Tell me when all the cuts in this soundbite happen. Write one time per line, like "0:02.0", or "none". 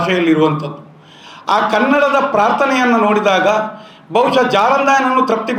none